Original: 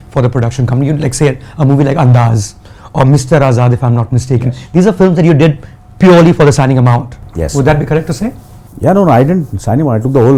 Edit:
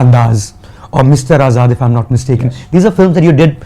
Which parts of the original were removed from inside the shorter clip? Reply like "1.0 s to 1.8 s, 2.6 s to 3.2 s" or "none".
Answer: none